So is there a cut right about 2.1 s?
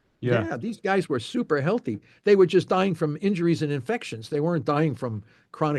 no; 0 cuts

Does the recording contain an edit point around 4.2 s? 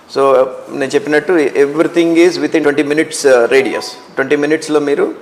no; 1 cut; at 2.6 s

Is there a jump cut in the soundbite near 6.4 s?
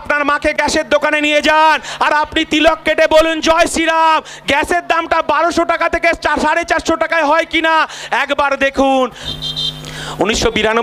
no; 1 cut; at 9.2 s

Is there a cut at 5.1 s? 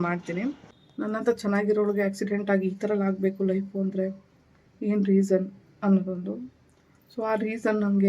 no; 1 cut; at 1.1 s

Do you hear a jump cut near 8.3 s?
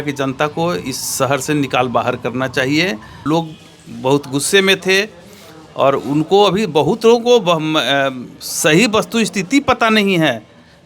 no; 1 cut; at 3.1 s

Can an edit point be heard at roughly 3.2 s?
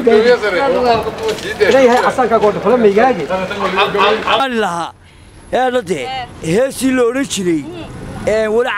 no; 1 cut; at 4.4 s

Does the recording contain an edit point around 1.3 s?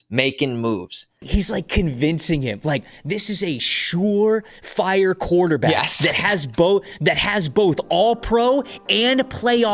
yes; 1 cut; at 1.3 s

